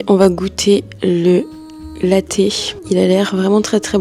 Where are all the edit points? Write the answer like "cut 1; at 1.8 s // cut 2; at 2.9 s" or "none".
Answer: none

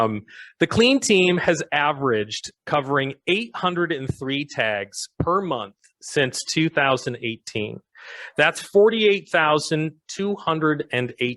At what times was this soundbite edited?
none

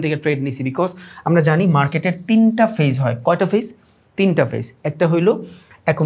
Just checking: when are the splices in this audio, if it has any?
none

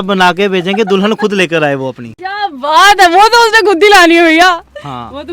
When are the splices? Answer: none

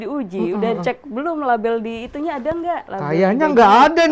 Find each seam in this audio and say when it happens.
cut 1; at 2.9 s

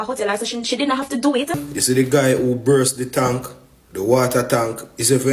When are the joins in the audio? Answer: cut 1; at 1.6 s

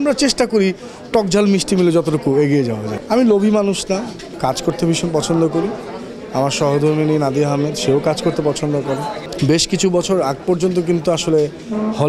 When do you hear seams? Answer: cut 1; at 2.9 s // cut 2; at 4.2 s // cut 3; at 9.2 s

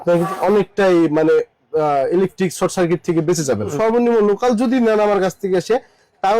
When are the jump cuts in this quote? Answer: cut 1; at 3.7 s

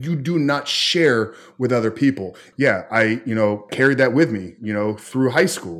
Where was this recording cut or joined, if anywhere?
cut 1; at 2.4 s

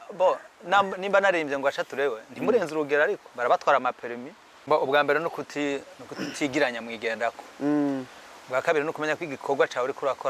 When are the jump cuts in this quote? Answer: cut 1; at 4.5 s

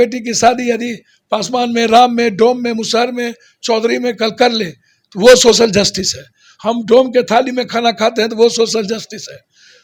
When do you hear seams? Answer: none

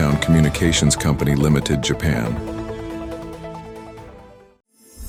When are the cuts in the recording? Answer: none

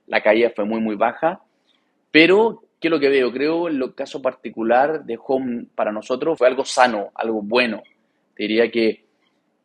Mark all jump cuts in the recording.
none

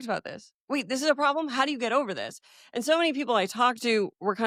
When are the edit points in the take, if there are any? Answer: none

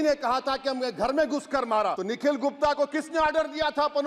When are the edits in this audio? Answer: cut 1; at 2.0 s

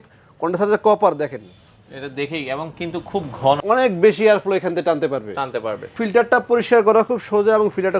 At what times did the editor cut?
cut 1; at 3.6 s // cut 2; at 6.0 s

